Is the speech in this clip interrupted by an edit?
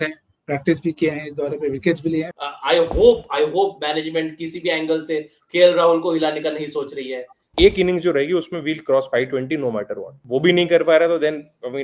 yes; 2 cuts; at 2.3 s, 7.4 s

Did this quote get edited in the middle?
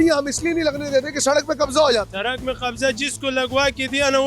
yes; 1 cut; at 2.1 s

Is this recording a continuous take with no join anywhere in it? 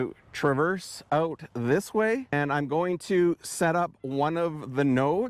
no; 1 cut; at 2.3 s

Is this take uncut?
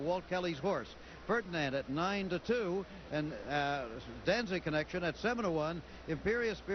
yes; 0 cuts

